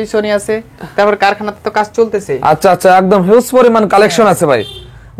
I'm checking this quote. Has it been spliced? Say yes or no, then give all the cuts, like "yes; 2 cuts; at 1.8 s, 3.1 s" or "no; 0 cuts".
no; 0 cuts